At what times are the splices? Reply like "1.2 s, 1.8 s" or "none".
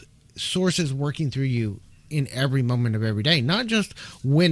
none